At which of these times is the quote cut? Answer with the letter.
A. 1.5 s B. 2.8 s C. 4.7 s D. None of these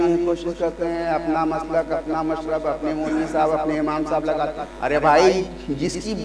C